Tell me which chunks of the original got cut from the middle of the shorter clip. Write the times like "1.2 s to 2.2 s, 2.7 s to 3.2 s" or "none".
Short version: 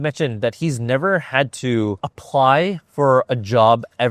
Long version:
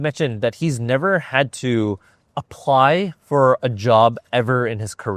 2.1 s to 2.4 s